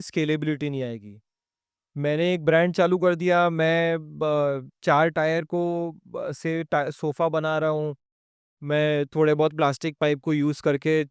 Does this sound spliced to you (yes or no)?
no